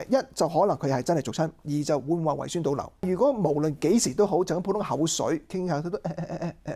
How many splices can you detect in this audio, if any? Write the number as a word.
one